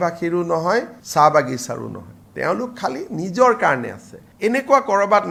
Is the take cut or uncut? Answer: uncut